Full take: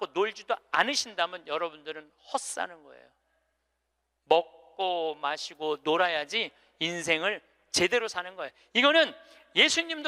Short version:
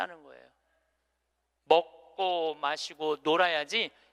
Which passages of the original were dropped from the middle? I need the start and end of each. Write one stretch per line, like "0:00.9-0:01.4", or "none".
none